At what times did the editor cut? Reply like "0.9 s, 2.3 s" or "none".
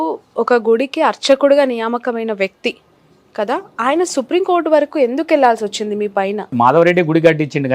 6.5 s